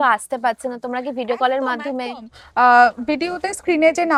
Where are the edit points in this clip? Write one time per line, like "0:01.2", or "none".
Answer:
none